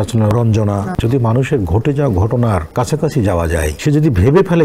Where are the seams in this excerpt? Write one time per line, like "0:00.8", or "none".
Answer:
0:00.9
0:02.7
0:03.7